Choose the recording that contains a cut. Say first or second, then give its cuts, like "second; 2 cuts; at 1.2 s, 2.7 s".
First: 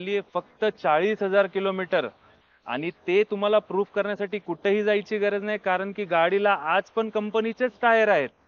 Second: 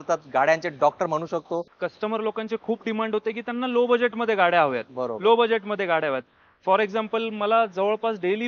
second; 1 cut; at 1.7 s